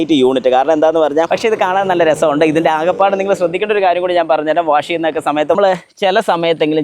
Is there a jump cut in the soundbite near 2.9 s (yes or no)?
no